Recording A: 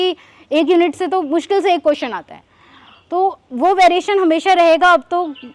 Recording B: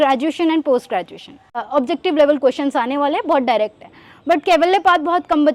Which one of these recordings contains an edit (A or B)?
B